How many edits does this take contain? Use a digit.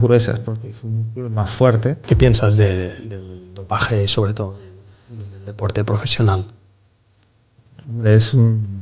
1